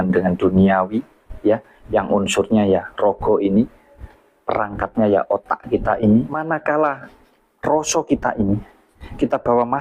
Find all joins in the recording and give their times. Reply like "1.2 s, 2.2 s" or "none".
6.4 s